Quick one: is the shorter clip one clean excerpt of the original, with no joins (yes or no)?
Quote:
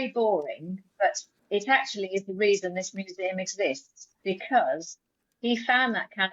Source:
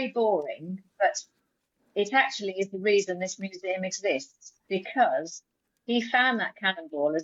no